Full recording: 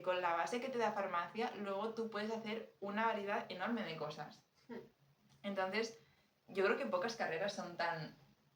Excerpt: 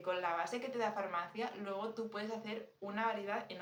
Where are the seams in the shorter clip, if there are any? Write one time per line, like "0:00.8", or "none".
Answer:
none